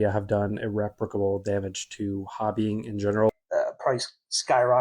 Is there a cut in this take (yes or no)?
yes